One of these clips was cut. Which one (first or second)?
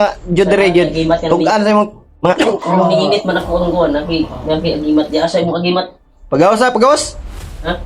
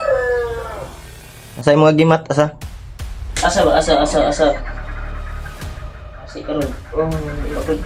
first